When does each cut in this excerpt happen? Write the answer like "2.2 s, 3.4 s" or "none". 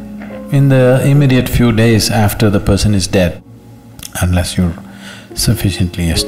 3.4 s

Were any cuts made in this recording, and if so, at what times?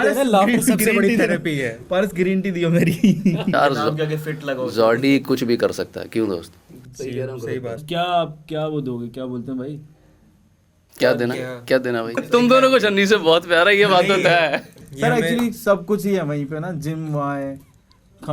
3.5 s, 7.8 s, 12.2 s

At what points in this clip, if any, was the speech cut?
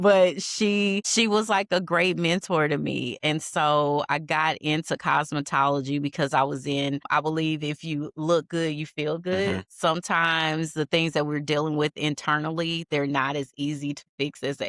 1.1 s, 7.1 s

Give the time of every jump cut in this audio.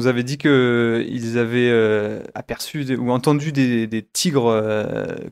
none

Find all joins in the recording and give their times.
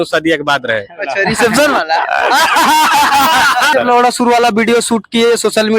3.7 s

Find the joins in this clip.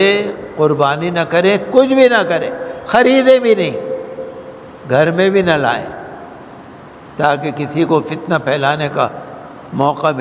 none

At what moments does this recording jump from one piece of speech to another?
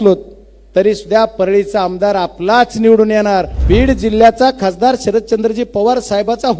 3.5 s

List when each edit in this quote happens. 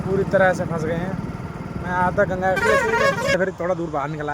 3.3 s

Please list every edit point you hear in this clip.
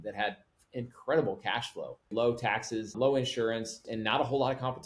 2.1 s, 2.9 s, 3.8 s

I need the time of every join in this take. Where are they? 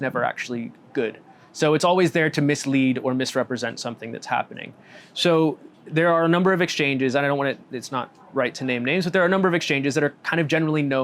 none

